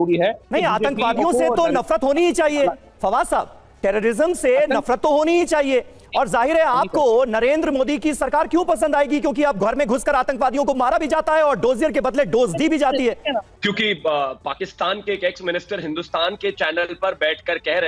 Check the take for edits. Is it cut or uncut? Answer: cut